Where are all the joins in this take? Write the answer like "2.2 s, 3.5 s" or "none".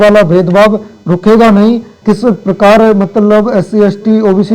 1.9 s